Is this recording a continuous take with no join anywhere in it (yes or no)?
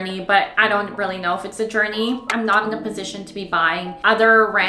no